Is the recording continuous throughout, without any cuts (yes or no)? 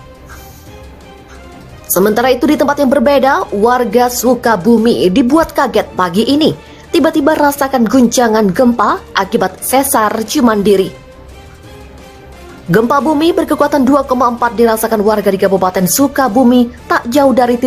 no